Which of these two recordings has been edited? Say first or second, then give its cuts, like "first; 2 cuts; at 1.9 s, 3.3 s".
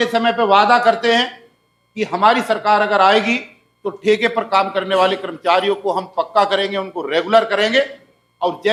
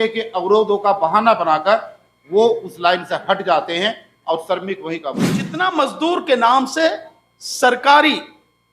second; 1 cut; at 5.4 s